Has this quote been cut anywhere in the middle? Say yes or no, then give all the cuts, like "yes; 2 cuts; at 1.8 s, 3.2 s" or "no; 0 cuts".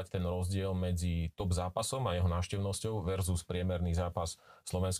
no; 0 cuts